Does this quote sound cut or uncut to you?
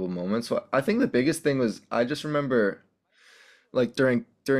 uncut